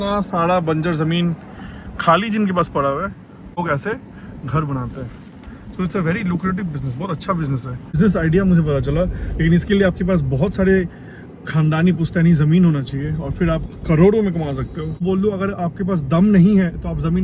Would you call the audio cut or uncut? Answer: cut